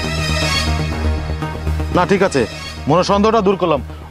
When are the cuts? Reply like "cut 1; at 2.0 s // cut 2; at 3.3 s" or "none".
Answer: cut 1; at 1.9 s